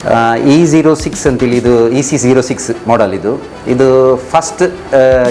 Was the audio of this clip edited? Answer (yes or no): no